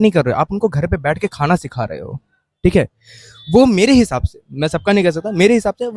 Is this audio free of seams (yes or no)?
yes